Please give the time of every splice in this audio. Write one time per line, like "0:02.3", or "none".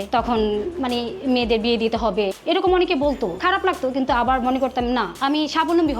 0:03.4